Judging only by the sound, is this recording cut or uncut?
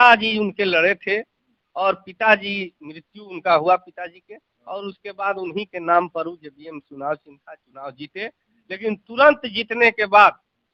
uncut